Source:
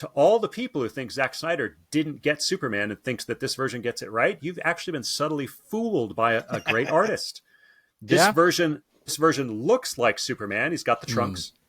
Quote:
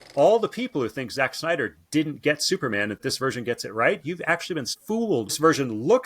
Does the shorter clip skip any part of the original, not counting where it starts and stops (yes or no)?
yes